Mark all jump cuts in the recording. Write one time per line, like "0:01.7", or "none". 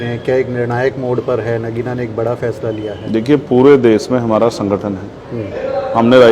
none